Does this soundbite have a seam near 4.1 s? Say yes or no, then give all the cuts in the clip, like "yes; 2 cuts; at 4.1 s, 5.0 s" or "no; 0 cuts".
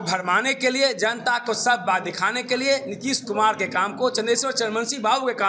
no; 0 cuts